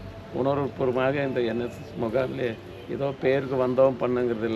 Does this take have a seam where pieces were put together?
no; 0 cuts

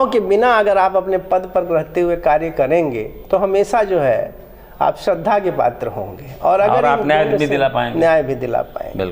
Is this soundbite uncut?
yes; 0 cuts

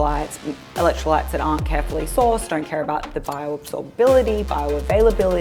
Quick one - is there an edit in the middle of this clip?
no; 0 cuts

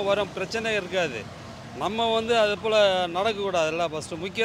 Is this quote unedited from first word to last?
yes; 0 cuts

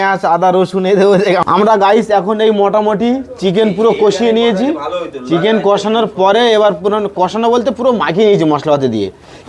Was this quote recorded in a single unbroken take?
no; 1 cut; at 1.4 s

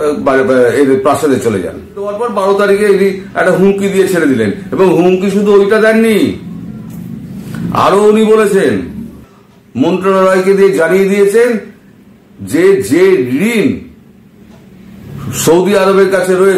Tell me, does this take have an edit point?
yes; 2 cuts; at 2.2 s, 9.0 s

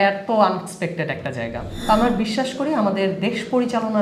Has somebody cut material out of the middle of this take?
yes; 1 cut; at 1.7 s

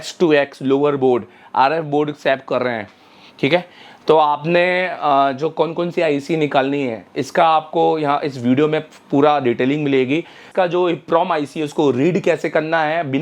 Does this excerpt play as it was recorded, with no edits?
no; 1 cut; at 10.4 s

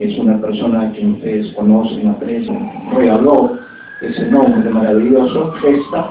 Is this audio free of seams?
yes; 0 cuts

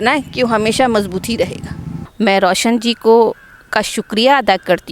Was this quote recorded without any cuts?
no; 1 cut; at 2.0 s

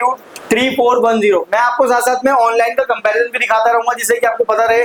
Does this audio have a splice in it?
no; 0 cuts

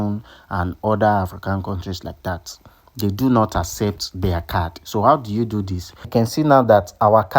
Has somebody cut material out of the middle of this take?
yes; 1 cut; at 6.1 s

